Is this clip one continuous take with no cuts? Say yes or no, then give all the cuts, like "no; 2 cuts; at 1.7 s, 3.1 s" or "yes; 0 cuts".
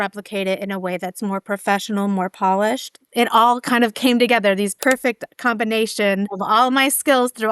no; 2 cuts; at 4.8 s, 6.3 s